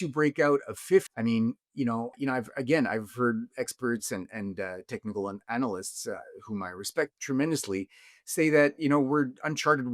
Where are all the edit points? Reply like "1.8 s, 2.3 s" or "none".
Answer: 1.1 s, 2.1 s, 7.2 s